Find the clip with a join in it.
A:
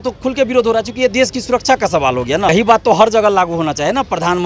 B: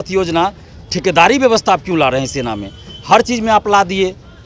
A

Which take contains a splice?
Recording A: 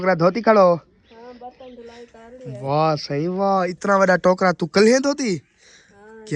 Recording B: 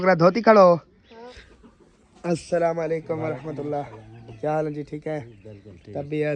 B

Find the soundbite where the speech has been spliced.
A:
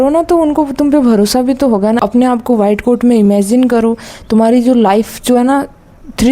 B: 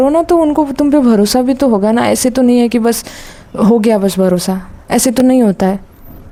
A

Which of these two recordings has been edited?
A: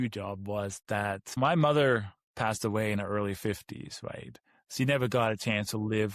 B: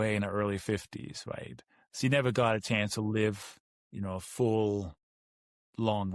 A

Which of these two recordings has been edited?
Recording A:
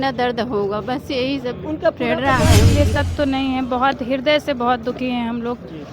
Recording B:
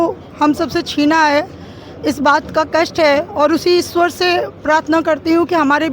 A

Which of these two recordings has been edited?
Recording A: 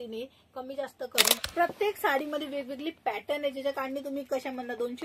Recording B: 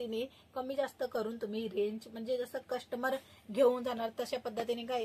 A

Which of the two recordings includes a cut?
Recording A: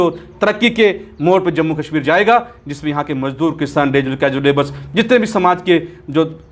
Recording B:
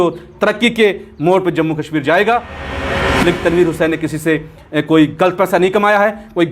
B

